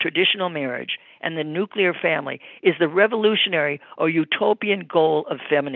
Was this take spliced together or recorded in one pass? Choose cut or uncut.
uncut